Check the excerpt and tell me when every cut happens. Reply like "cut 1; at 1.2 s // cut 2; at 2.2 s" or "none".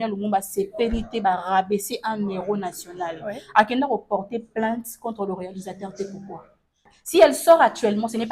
cut 1; at 6.9 s